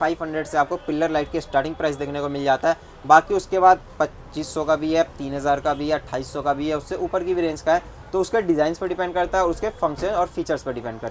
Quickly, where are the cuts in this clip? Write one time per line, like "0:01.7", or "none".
none